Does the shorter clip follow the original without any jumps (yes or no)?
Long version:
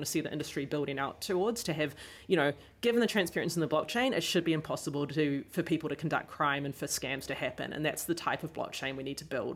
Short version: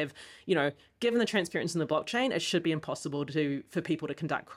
yes